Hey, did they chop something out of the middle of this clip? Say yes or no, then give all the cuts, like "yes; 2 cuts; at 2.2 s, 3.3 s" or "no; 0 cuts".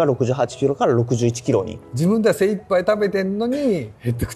yes; 1 cut; at 1.8 s